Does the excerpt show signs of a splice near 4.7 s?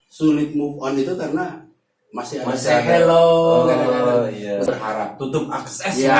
yes; 1 cut; at 4.7 s

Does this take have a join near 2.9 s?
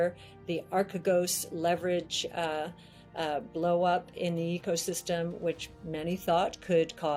no; 0 cuts

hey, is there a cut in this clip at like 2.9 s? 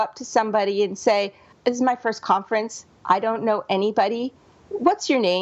no; 1 cut; at 1.5 s

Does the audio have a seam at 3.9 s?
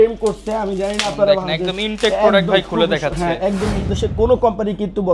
yes; 1 cut; at 3.9 s

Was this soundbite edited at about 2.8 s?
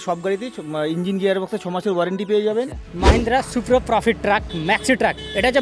yes; 1 cut; at 2.8 s

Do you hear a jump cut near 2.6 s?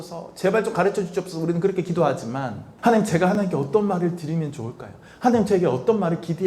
yes; 1 cut; at 2.6 s

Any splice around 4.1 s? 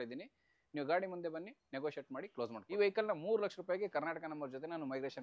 no; 1 cut; at 2.8 s

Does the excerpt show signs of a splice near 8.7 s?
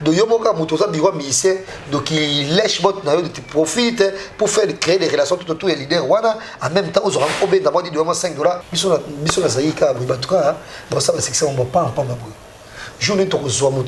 yes; 1 cut; at 8.7 s

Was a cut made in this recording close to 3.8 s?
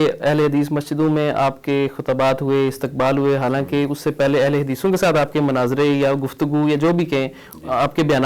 no; 0 cuts

